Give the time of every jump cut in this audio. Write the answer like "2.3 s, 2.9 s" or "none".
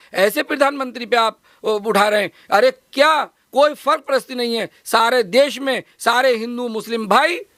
none